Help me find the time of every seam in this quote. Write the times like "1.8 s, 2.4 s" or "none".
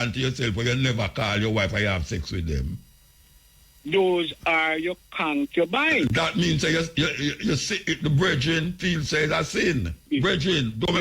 10.1 s